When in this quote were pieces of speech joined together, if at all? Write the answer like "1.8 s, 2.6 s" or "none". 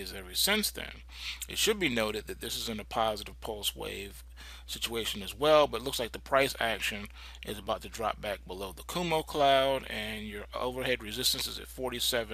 none